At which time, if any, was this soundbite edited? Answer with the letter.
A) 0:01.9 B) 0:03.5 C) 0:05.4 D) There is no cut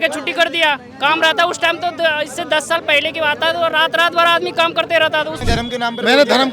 C